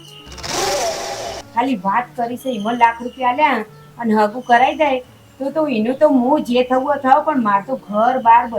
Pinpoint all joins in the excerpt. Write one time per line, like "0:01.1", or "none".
0:01.4